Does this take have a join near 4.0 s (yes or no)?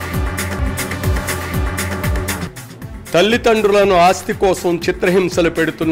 no